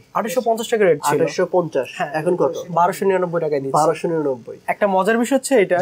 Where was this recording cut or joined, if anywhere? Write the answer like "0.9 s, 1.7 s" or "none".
4.6 s